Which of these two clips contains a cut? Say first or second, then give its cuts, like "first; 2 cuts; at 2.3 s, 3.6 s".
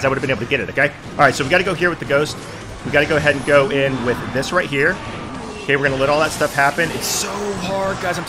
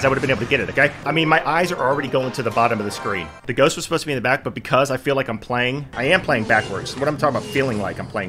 second; 3 cuts; at 1.0 s, 3.2 s, 5.9 s